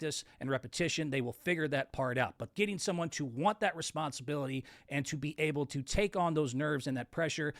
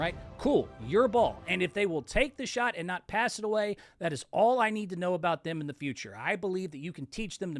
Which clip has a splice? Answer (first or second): first